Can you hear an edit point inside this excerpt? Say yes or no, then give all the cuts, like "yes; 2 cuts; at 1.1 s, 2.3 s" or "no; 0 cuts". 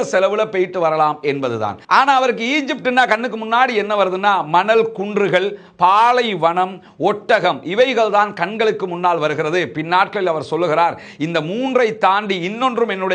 no; 0 cuts